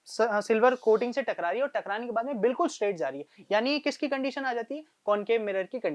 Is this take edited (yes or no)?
no